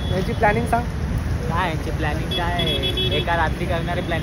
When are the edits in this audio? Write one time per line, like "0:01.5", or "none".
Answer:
none